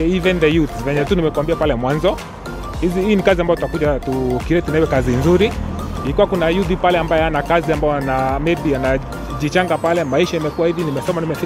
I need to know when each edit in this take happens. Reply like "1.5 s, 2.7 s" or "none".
none